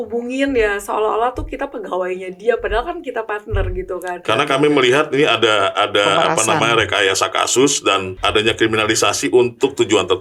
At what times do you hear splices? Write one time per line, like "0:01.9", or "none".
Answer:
0:04.2
0:08.1

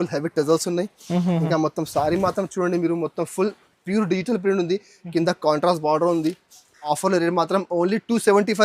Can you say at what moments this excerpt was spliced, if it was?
0:07.0

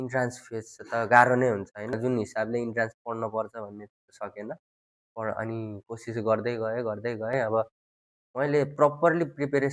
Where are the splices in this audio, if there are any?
0:01.9

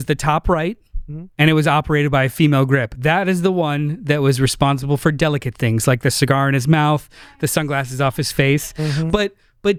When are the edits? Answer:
none

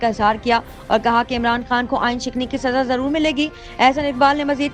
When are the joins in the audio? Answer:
none

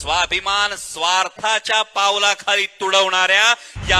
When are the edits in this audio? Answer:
none

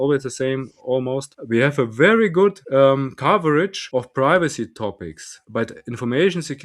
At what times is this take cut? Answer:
0:01.3
0:02.6
0:03.8
0:05.3

